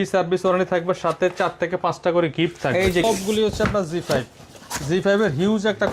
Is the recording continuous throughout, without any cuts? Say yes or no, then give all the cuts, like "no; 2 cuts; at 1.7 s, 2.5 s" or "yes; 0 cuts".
no; 1 cut; at 3.0 s